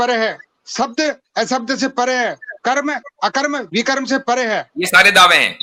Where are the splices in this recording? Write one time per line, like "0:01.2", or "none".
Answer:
none